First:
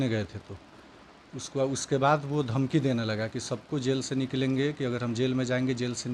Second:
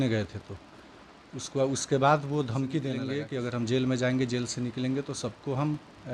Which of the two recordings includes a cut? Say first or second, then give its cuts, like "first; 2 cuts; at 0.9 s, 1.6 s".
second; 1 cut; at 3.1 s